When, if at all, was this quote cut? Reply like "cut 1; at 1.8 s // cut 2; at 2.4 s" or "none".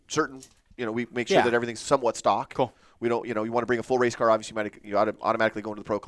none